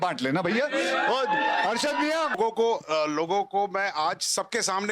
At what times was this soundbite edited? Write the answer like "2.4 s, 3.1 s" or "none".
2.4 s